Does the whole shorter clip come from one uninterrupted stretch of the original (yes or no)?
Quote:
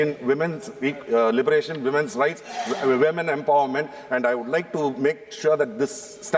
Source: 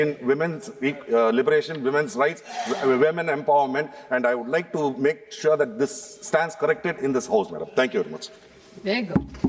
yes